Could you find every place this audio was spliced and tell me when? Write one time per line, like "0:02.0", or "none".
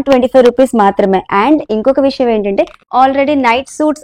0:02.9